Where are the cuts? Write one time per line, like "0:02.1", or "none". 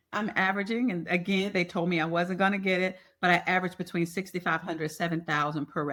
none